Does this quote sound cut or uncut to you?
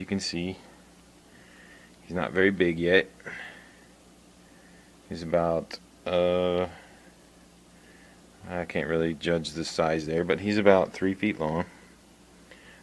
uncut